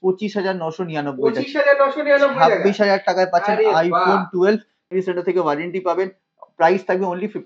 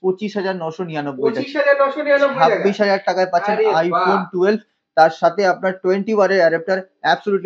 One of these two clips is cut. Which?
first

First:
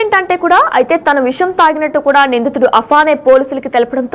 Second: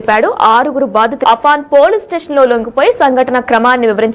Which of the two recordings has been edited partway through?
second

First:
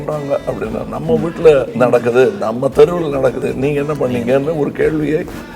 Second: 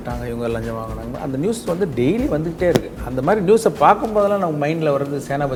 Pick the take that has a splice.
first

